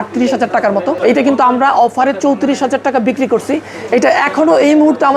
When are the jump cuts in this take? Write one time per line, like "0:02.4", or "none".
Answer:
0:01.0